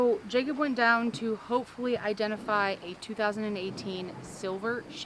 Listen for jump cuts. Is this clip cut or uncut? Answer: uncut